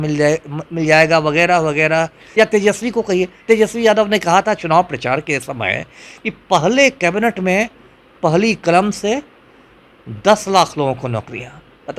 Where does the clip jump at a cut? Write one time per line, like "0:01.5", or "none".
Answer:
0:02.2

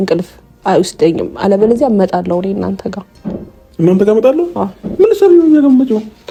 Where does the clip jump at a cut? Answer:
none

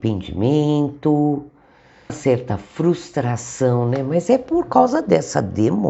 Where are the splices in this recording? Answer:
0:02.2

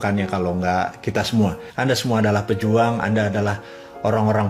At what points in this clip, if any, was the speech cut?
0:01.7

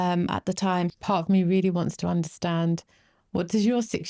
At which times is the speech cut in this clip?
0:00.9

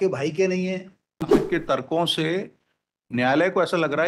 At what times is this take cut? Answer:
0:01.4

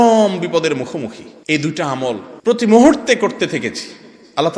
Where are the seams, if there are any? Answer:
0:01.3
0:02.3

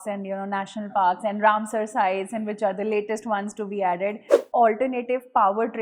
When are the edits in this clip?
0:04.3

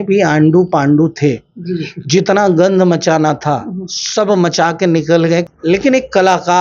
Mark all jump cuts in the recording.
0:05.5

